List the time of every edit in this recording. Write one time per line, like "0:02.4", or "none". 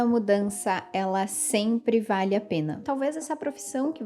0:02.8